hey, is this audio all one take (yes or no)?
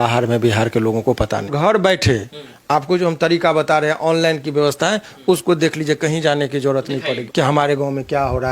no